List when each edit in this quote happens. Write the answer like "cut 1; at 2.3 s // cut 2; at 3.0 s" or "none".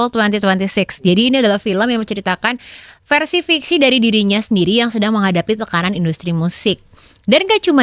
none